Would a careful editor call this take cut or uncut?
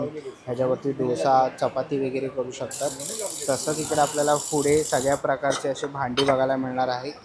uncut